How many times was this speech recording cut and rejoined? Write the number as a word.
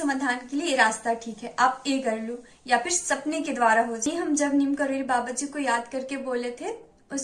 one